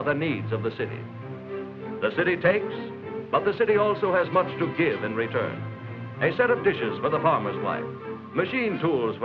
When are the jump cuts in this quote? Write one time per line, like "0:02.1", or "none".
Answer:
none